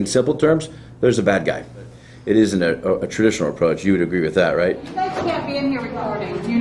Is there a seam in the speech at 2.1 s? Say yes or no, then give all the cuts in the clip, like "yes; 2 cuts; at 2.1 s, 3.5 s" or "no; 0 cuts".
yes; 2 cuts; at 2.1 s, 4.9 s